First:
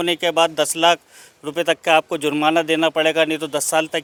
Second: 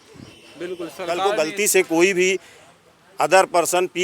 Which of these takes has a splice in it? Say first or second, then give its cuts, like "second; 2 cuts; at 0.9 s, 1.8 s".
second; 1 cut; at 1.2 s